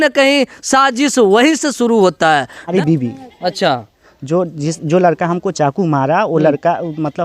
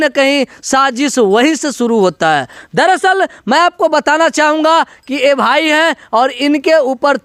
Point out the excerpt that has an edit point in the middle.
first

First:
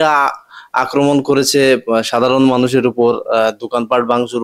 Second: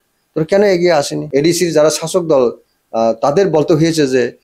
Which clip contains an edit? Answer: second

